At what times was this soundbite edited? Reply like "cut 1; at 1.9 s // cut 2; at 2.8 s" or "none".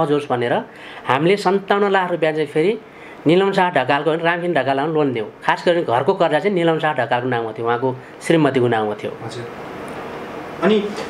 none